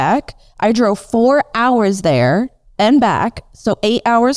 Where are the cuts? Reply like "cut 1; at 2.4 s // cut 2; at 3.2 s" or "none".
none